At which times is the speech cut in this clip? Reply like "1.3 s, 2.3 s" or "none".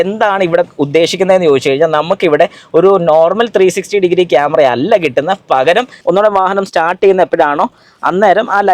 5.9 s

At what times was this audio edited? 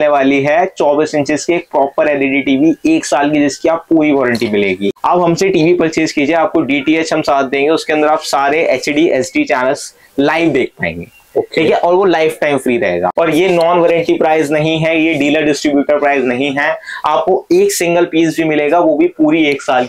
4.9 s, 13.1 s

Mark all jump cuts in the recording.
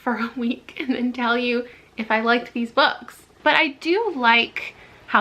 3.3 s

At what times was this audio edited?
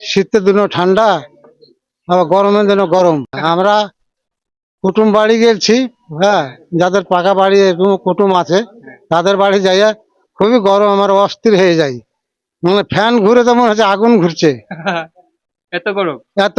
3.4 s

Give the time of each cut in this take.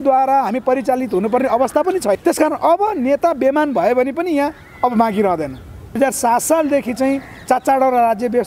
2.2 s, 6.0 s

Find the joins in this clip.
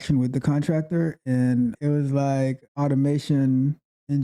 1.8 s, 2.6 s

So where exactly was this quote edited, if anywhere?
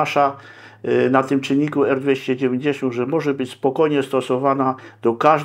none

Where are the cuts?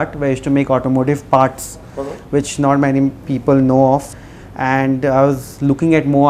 4.2 s

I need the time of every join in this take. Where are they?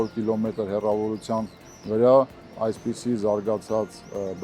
2.4 s

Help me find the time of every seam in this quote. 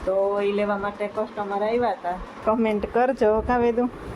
2.3 s

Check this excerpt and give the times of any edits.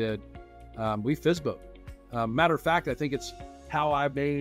none

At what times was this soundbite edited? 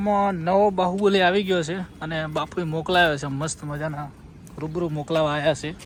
none

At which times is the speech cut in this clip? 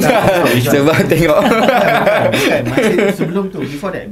none

